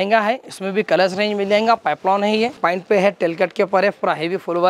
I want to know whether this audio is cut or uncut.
cut